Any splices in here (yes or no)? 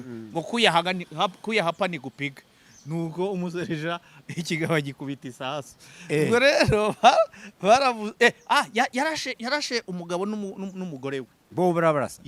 no